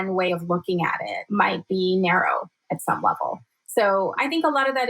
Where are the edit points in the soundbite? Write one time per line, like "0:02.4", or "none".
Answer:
0:01.2
0:04.1